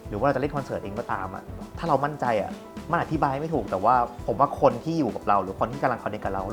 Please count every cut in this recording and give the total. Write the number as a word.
one